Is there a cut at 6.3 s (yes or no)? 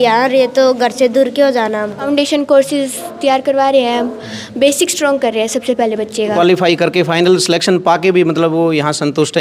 yes